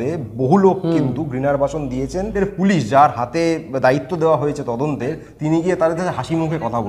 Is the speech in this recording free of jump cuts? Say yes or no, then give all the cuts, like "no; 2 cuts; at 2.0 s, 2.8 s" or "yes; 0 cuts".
no; 1 cut; at 2.4 s